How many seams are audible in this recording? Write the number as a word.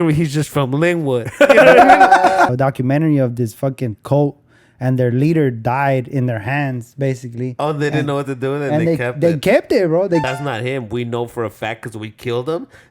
two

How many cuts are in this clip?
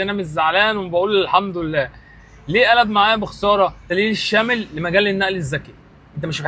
one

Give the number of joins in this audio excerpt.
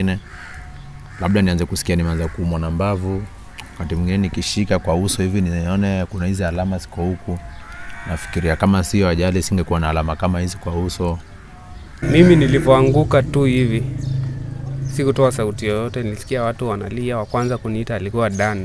one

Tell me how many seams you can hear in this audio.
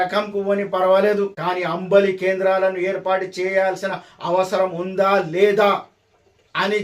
one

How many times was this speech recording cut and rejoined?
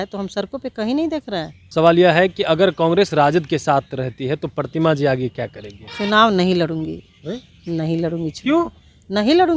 one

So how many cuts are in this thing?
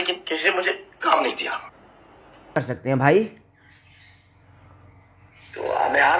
one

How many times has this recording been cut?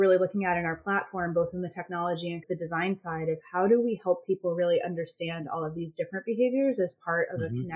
one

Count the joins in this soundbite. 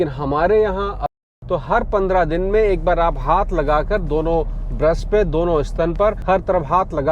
one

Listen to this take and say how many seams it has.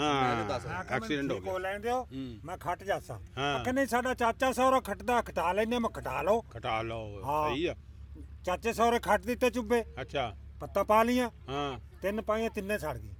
zero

